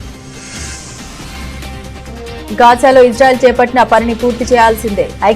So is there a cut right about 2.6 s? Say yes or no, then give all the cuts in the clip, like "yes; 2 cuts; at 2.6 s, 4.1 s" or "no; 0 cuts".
no; 1 cut; at 1.1 s